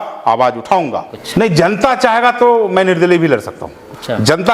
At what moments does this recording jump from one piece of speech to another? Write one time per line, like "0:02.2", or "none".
0:01.2